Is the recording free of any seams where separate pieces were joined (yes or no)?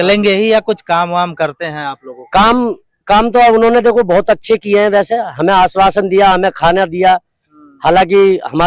yes